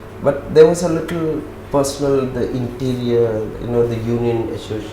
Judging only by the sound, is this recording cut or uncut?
cut